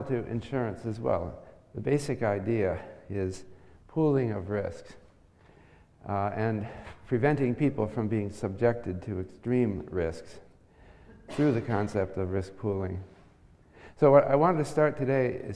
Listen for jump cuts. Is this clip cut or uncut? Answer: uncut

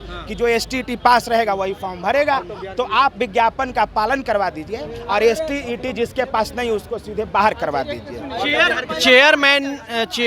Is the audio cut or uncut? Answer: uncut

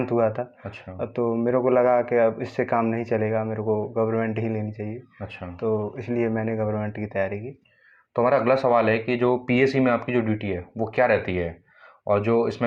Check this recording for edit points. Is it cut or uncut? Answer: uncut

